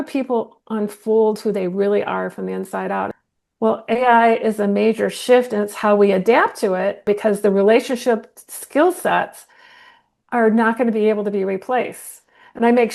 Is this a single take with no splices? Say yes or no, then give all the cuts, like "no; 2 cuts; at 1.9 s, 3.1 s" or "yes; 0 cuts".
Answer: no; 2 cuts; at 3.1 s, 7.0 s